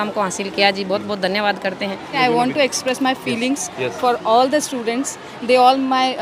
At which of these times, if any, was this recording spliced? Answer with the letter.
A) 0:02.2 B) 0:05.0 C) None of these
A